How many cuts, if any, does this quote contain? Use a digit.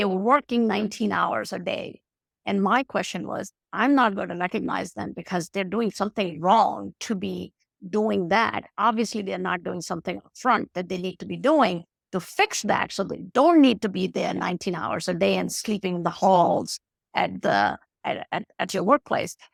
0